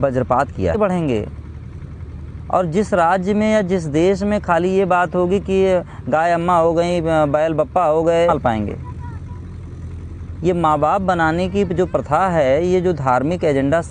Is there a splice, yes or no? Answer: yes